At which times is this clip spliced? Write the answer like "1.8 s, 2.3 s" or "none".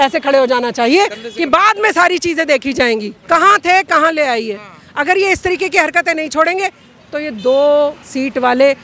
3.1 s